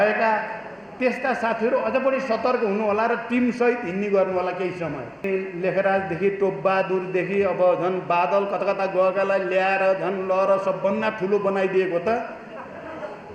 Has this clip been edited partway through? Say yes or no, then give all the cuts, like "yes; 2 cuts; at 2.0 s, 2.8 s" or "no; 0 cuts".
yes; 1 cut; at 5.3 s